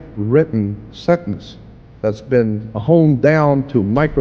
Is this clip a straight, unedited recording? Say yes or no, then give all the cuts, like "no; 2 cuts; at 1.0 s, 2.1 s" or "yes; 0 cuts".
no; 1 cut; at 2.7 s